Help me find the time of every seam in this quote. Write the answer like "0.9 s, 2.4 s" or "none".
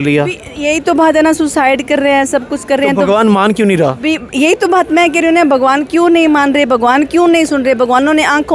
none